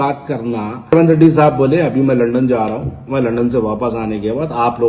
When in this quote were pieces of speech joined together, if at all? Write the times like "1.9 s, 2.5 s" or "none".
0.9 s